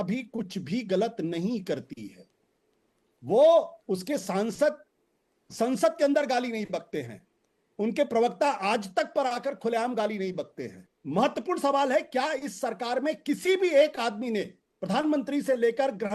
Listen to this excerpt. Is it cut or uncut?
uncut